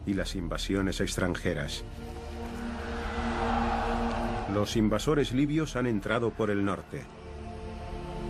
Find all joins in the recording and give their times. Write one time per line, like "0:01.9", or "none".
0:01.4